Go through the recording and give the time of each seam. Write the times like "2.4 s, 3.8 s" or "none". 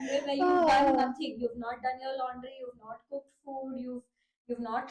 none